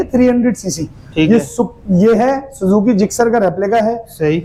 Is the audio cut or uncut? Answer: uncut